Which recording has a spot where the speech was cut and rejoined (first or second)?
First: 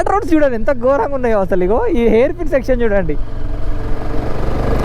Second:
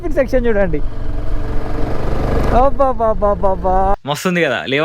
second